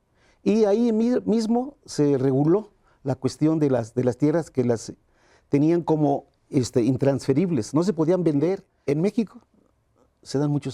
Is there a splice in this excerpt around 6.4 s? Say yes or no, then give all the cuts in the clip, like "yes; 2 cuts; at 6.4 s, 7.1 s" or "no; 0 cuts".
no; 1 cut; at 8.7 s